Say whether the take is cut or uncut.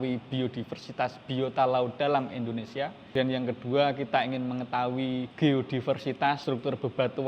cut